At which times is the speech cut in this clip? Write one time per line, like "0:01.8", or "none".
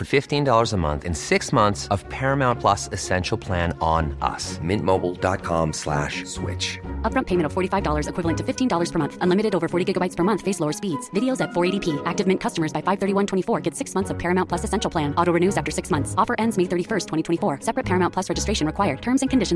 none